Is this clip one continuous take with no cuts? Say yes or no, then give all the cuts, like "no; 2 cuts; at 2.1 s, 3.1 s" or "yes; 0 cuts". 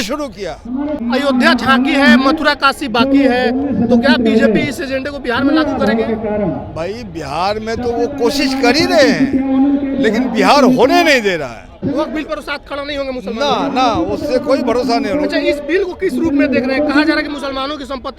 no; 2 cuts; at 1.0 s, 11.8 s